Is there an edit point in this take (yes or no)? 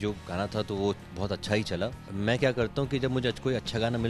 yes